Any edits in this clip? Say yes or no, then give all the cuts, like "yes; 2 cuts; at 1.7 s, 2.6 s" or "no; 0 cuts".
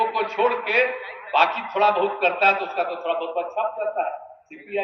no; 0 cuts